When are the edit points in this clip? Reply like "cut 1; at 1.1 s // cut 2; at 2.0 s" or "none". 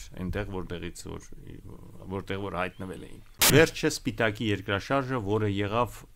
cut 1; at 3.5 s